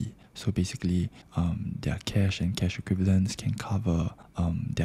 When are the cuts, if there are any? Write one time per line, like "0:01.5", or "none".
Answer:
none